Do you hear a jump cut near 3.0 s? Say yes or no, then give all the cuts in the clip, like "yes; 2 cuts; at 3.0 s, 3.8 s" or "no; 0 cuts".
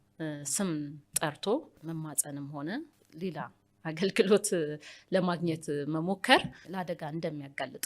yes; 3 cuts; at 1.7 s, 3.0 s, 6.6 s